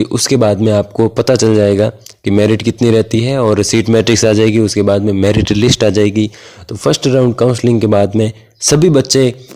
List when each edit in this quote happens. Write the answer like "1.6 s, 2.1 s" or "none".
none